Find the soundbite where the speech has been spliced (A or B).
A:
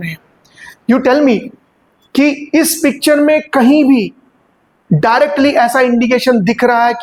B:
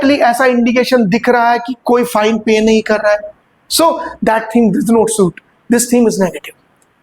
B